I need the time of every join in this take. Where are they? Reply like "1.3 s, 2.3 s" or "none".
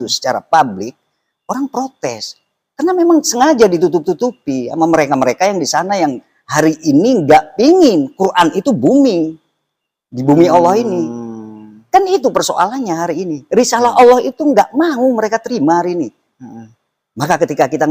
none